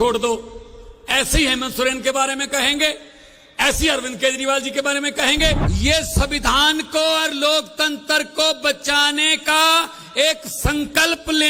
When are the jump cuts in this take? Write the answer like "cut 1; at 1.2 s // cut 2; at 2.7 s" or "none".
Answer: cut 1; at 5.7 s